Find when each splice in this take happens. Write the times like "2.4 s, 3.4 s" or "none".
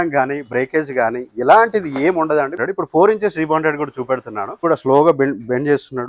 2.6 s, 4.6 s